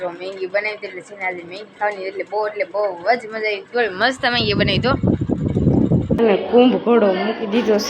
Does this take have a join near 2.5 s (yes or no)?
no